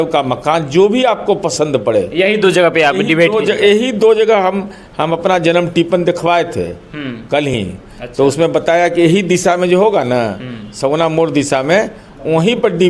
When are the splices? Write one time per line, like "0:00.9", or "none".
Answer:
none